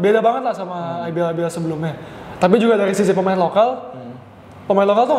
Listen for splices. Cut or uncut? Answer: uncut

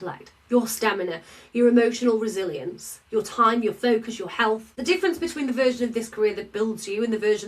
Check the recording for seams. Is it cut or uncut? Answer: cut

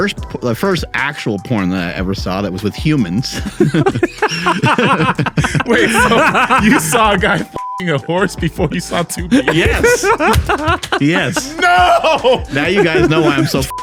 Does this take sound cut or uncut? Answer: uncut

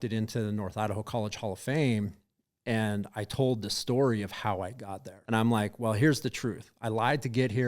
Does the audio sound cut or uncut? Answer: cut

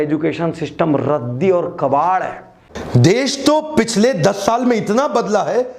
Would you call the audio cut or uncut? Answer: cut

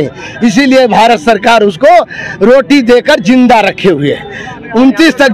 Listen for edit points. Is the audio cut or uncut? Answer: uncut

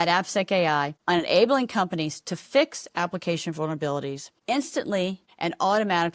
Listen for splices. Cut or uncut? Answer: cut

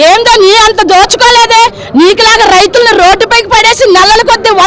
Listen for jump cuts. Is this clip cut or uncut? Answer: uncut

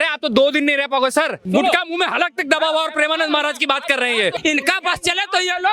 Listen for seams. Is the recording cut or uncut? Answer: cut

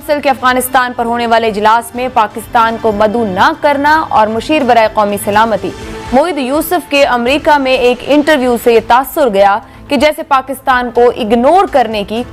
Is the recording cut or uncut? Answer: uncut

